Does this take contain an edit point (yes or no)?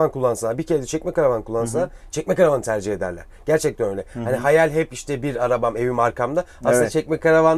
no